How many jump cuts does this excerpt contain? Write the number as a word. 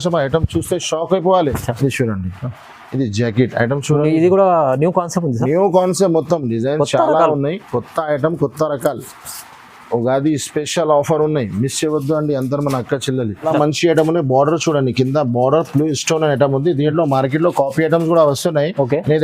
two